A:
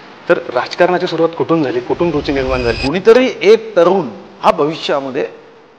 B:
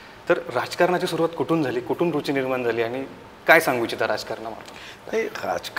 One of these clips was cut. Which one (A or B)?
A